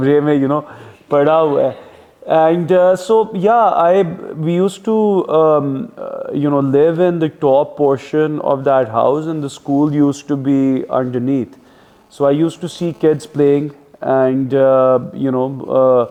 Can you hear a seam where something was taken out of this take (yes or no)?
no